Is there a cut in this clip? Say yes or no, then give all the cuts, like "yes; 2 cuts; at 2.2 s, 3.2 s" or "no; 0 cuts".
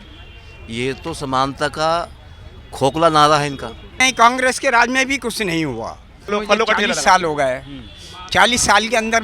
yes; 2 cuts; at 4.0 s, 6.3 s